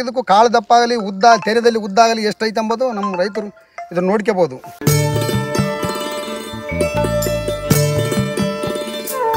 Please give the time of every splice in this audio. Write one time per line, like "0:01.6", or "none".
0:04.7